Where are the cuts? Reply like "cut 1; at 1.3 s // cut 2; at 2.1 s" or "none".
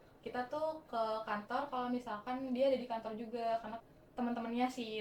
cut 1; at 3.8 s